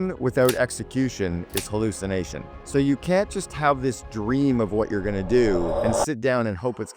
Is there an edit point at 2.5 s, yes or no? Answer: no